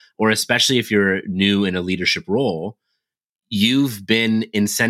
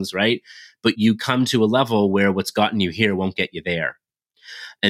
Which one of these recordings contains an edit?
second; 1 cut; at 1.0 s

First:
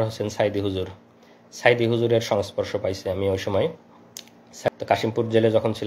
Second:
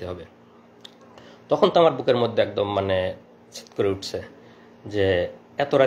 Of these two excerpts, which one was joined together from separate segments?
first; 1 cut; at 4.7 s

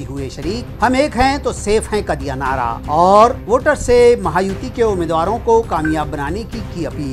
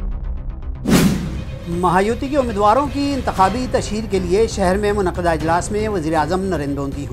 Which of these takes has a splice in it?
second; 1 cut; at 1.1 s

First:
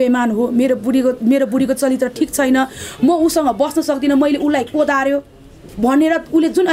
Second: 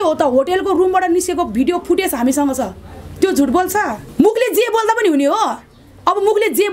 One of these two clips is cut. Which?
second; 1 cut; at 4.0 s

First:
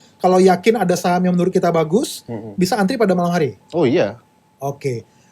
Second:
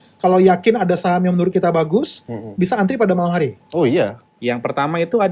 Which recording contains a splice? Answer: second; 1 cut; at 4.3 s

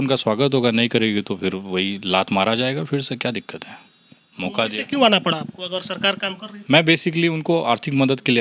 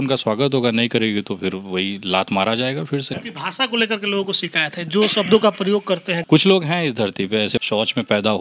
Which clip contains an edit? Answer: second; 3 cuts; at 3.2 s, 6.1 s, 7.6 s

